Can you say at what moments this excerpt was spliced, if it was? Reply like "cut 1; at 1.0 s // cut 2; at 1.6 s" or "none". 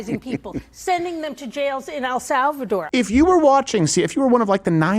cut 1; at 2.9 s